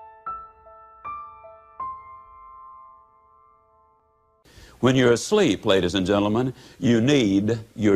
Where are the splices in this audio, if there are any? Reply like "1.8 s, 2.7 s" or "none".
4.0 s